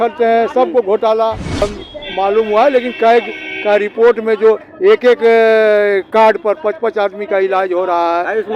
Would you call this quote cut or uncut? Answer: cut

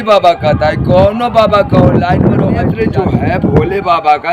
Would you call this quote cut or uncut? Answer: cut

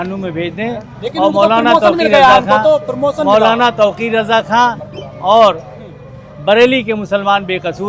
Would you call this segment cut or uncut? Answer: uncut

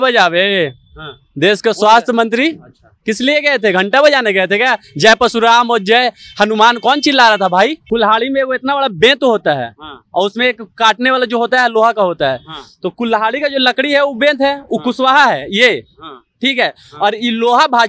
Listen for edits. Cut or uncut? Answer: cut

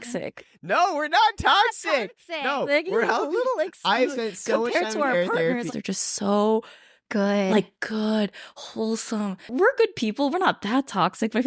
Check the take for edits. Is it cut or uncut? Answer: cut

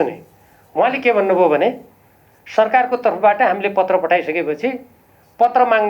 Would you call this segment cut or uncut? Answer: uncut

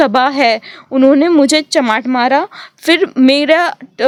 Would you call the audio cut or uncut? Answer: uncut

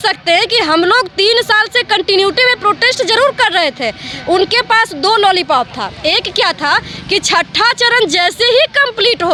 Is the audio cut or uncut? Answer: uncut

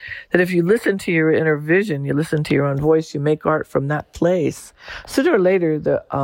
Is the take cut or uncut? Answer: uncut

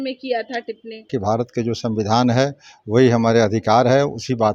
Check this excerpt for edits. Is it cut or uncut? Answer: cut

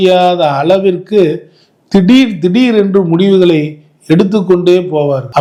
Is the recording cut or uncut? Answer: uncut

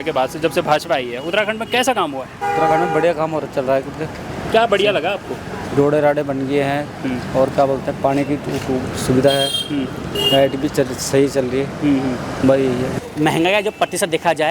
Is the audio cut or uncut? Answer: cut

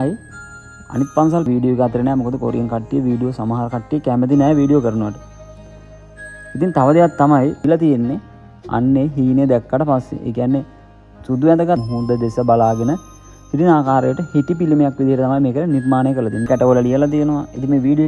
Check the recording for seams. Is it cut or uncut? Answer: cut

